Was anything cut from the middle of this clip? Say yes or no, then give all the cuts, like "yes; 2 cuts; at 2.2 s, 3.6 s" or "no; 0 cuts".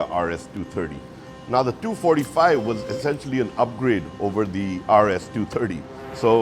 yes; 1 cut; at 1.3 s